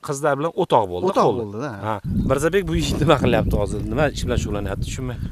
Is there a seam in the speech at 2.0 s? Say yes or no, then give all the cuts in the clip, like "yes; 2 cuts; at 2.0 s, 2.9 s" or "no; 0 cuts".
yes; 1 cut; at 2.0 s